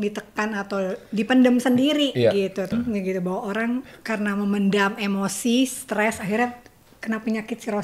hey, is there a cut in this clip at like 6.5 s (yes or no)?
no